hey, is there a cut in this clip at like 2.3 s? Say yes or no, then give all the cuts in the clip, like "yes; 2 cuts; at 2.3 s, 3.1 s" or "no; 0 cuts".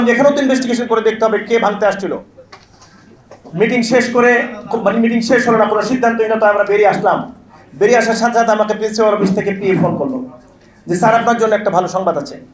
no; 0 cuts